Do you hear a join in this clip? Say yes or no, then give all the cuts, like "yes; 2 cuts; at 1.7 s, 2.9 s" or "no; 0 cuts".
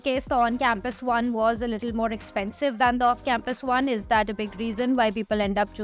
no; 0 cuts